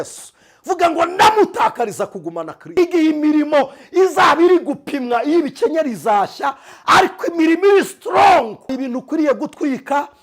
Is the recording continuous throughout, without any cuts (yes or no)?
no